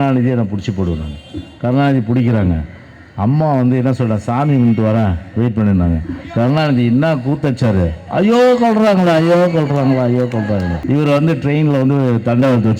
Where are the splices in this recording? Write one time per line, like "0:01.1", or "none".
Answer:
0:10.8